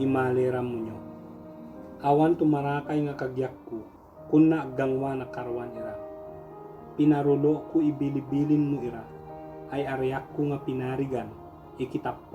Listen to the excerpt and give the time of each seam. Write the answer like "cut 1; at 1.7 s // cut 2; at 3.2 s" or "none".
none

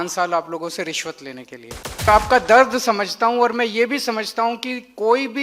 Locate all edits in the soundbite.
cut 1; at 2.1 s

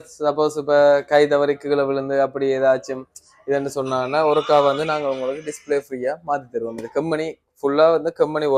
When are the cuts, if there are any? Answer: none

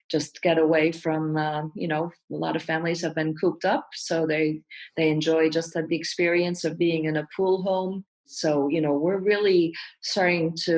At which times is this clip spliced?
cut 1; at 8.3 s

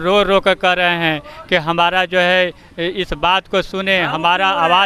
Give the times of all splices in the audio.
none

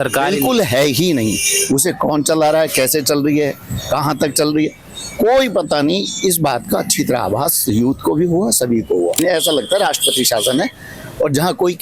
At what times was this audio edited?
cut 1; at 9.2 s

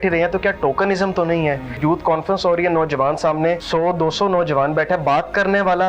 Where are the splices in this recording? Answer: cut 1; at 1.8 s // cut 2; at 3.6 s

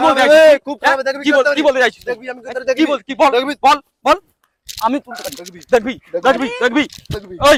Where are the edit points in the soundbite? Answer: none

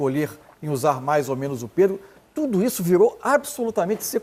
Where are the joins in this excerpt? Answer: none

